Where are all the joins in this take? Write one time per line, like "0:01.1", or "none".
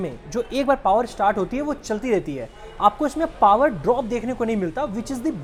none